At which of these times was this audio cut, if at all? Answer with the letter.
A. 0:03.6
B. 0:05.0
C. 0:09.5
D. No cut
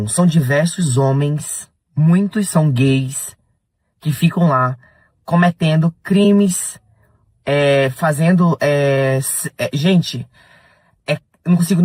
D